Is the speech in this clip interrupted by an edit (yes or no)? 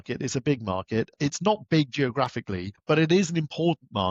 yes